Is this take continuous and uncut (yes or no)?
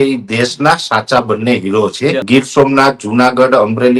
no